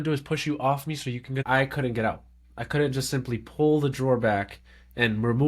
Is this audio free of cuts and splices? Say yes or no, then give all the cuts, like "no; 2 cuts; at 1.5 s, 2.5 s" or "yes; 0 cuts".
no; 1 cut; at 1.4 s